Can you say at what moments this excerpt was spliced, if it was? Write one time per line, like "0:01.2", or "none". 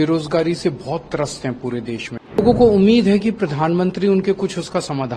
0:02.4